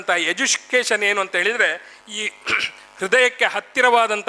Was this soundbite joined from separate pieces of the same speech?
no; 0 cuts

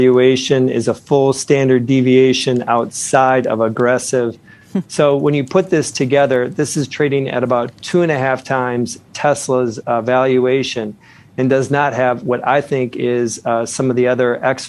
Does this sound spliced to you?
yes; 1 cut; at 4.5 s

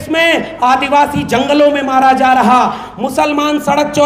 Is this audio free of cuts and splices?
yes; 0 cuts

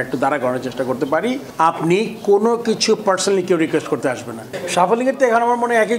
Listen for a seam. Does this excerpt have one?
yes; 2 cuts; at 1.4 s, 4.5 s

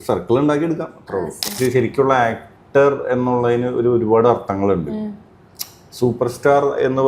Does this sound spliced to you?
yes; 1 cut; at 1.5 s

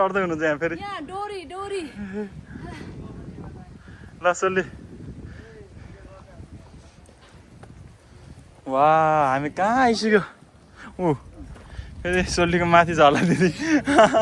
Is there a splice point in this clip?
no; 0 cuts

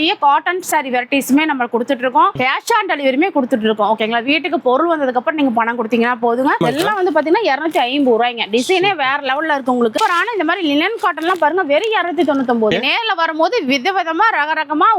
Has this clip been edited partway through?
yes; 4 cuts; at 2.4 s, 6.6 s, 9.9 s, 12.7 s

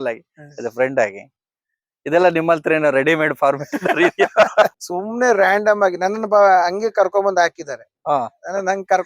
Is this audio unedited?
no; 1 cut; at 4.8 s

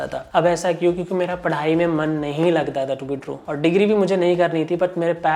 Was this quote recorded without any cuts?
yes; 0 cuts

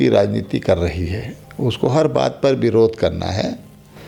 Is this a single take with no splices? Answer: yes; 0 cuts

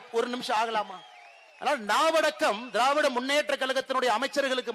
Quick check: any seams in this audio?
no; 0 cuts

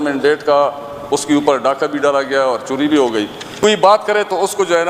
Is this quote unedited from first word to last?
no; 1 cut; at 3.4 s

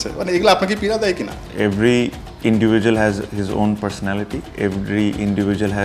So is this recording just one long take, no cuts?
yes; 0 cuts

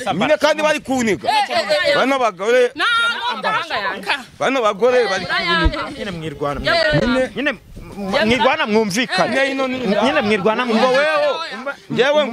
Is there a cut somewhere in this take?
no; 0 cuts

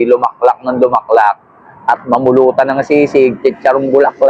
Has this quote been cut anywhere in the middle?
no; 0 cuts

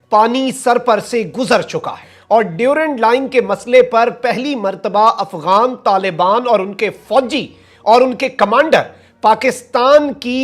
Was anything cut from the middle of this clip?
yes; 1 cut; at 2.1 s

